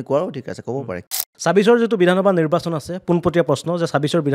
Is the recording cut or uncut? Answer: cut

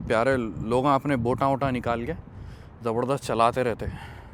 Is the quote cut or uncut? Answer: uncut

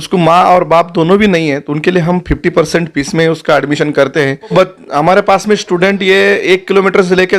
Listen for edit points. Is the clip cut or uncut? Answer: cut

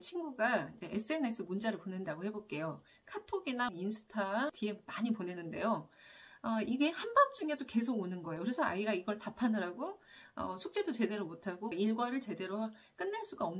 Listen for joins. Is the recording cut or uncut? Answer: uncut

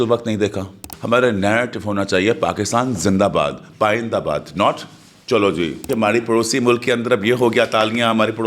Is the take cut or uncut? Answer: cut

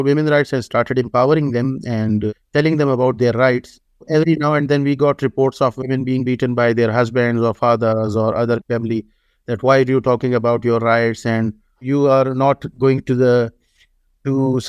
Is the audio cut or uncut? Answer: cut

